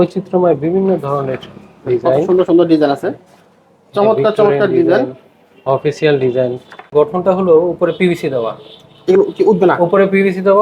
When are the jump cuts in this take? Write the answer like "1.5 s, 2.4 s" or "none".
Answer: 6.8 s